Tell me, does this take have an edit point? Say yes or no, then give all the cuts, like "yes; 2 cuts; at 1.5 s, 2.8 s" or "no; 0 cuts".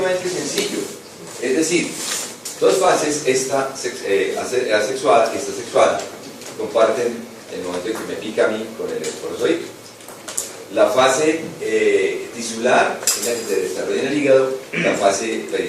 yes; 1 cut; at 13.2 s